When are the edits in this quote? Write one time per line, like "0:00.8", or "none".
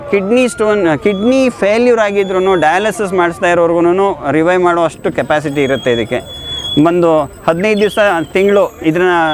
none